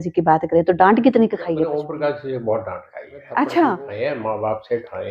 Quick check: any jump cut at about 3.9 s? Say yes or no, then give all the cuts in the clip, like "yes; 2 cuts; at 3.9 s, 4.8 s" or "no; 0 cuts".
yes; 2 cuts; at 1.7 s, 3.9 s